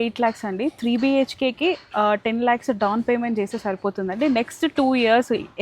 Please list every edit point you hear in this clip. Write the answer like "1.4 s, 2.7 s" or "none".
none

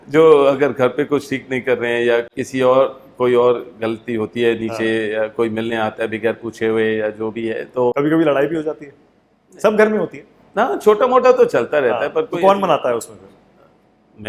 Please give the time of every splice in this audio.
none

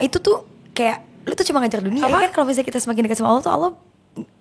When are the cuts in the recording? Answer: 2.0 s

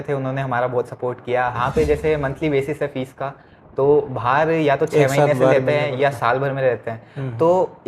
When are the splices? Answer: 1.6 s

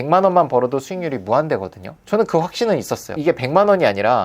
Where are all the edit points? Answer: 3.2 s

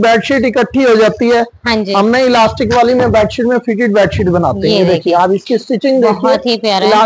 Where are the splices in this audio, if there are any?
none

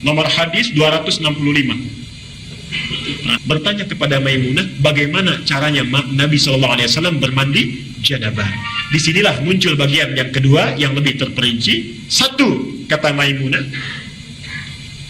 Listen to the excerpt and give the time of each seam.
3.4 s

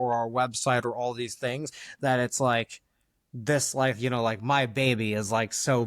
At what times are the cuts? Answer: none

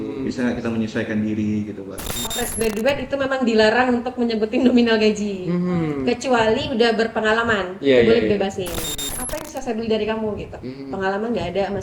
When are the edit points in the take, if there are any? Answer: 2.3 s, 9.0 s

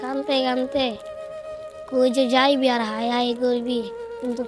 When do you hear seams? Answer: none

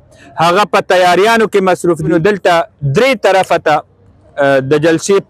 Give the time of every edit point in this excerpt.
2.1 s

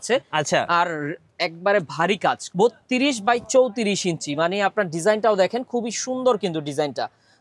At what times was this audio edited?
2.4 s

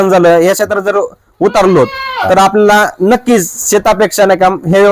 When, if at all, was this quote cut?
none

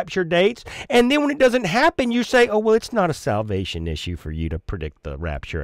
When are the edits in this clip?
none

